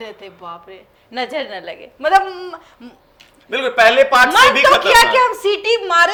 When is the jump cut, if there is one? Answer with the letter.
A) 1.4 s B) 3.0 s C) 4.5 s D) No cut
D